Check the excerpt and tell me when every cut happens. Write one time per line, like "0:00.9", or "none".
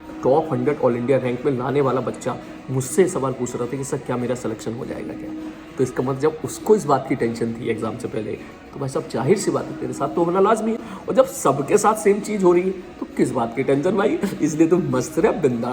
none

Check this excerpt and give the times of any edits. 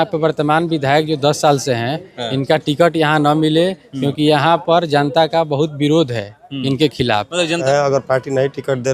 0:07.6

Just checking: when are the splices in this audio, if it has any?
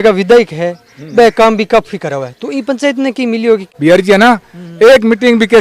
0:03.7

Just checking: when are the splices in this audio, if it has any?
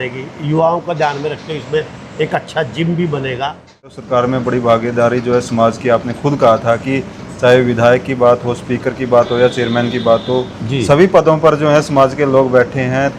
0:04.0

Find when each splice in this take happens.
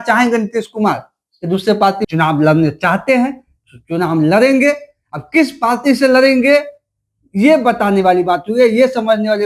0:02.0

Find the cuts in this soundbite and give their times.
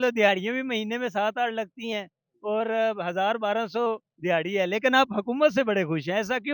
none

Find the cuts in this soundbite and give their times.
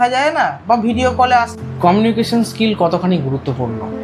0:01.6

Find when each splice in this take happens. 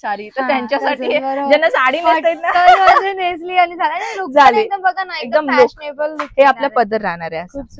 none

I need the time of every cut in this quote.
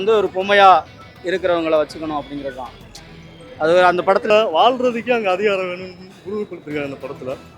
0:04.2

